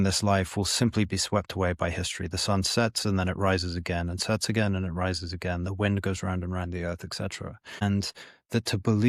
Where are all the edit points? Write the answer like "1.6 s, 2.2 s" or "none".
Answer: none